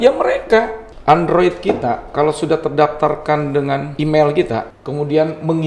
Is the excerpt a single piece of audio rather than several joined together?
no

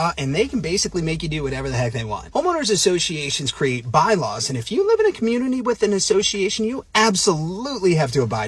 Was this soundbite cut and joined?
no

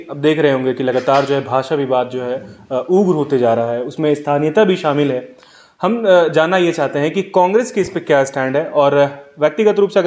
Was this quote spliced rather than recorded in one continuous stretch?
no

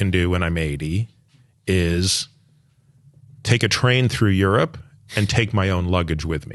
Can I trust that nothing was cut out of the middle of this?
yes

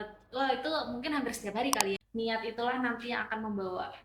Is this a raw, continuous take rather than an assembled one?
no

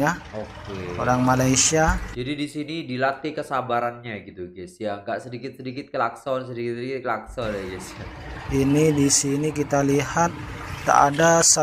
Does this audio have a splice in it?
no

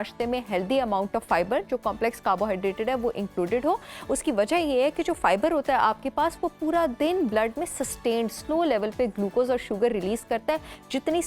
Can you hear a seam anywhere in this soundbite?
no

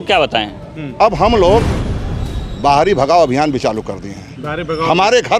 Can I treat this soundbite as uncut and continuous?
no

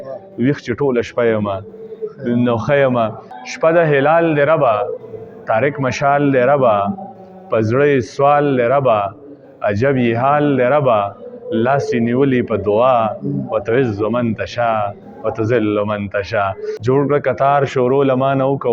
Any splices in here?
yes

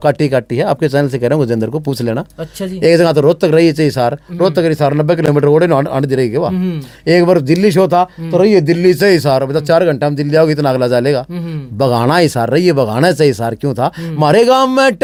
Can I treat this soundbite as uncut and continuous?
yes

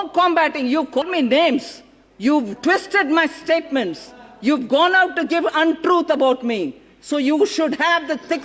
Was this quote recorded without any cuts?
no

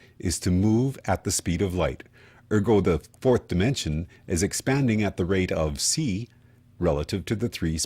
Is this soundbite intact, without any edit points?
no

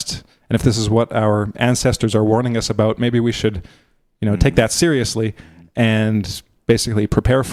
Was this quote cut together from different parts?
no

